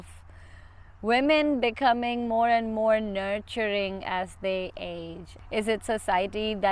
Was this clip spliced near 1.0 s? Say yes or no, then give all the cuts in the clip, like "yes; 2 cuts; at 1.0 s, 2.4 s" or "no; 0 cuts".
no; 1 cut; at 5.4 s